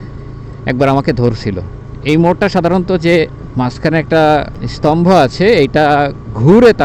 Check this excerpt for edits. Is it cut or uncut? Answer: cut